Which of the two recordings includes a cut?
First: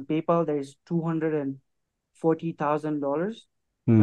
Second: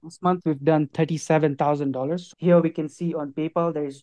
second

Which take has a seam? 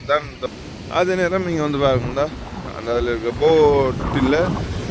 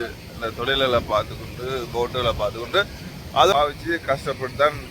second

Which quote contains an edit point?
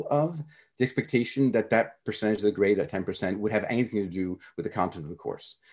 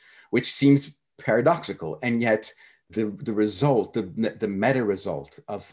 second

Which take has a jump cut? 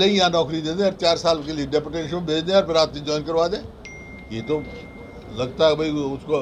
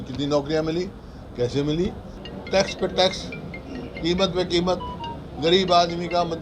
second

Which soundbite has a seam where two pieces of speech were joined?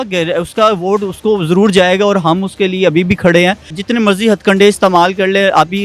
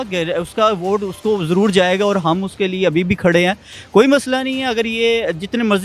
first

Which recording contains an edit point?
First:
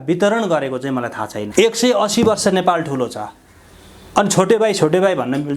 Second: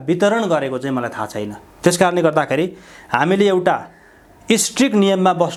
first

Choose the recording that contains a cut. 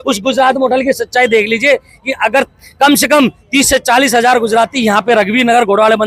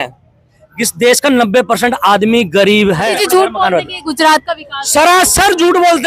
second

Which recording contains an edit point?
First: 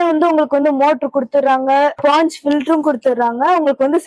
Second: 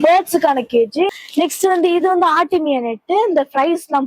second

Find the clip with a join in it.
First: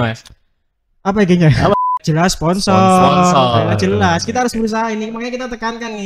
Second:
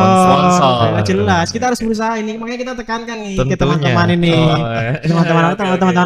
first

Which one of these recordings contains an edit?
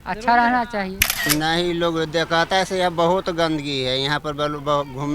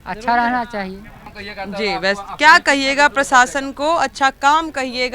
first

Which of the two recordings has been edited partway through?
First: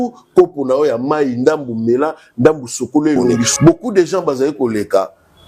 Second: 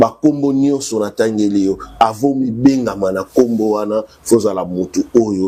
first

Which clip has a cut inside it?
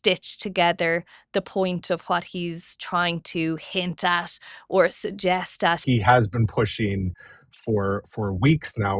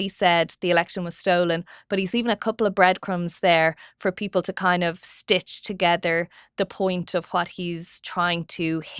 first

